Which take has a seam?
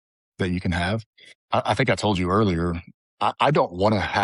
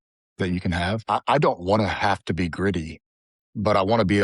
second; 1 cut; at 1.0 s

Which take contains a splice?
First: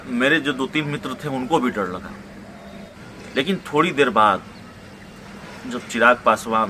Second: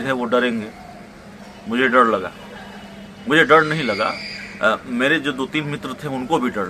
first; 1 cut; at 2.9 s

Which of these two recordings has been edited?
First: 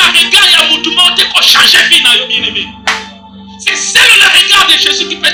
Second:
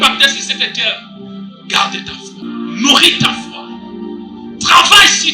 second; 1 cut; at 2.4 s

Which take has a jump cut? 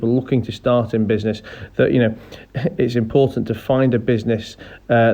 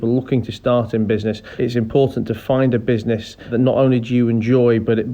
second; 2 cuts; at 1.5 s, 3.5 s

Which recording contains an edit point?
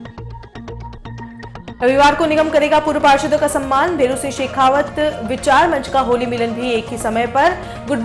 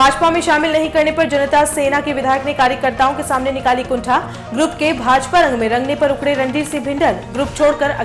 first; 1 cut; at 1.6 s

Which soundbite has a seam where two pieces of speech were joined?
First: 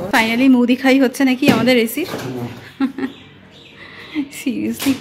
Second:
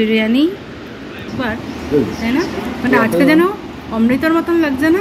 second; 1 cut; at 1.3 s

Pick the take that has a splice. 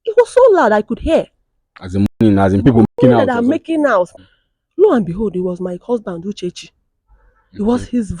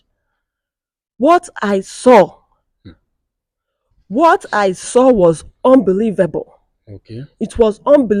first; 1 cut; at 4.1 s

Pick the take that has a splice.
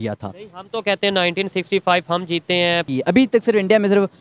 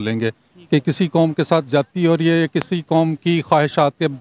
first; 1 cut; at 2.9 s

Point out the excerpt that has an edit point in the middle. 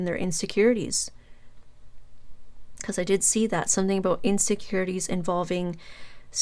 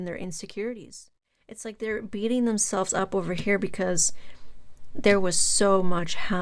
second; 1 cut; at 1.7 s

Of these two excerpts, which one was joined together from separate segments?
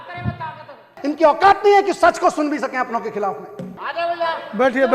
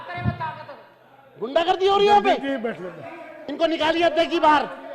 first; 2 cuts; at 1.0 s, 3.8 s

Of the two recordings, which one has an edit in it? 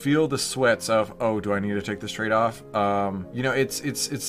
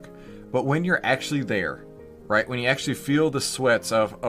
first; 1 cut; at 3.3 s

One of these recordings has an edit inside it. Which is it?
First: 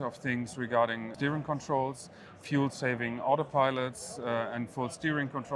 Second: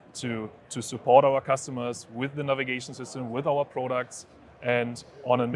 first; 1 cut; at 1.1 s

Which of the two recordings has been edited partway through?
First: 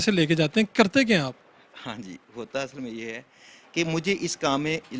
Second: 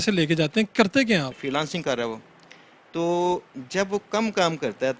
second; 1 cut; at 1.4 s

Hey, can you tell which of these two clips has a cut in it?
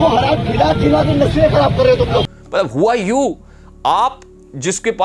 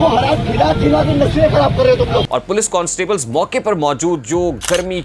second; 1 cut; at 2.3 s

